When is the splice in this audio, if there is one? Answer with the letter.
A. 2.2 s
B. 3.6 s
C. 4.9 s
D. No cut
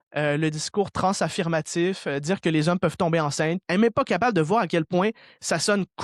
B